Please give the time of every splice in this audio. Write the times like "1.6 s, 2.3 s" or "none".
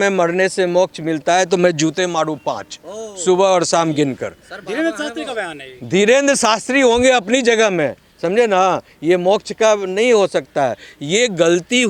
none